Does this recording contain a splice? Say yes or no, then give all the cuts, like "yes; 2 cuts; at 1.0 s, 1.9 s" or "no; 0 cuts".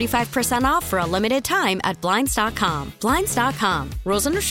no; 0 cuts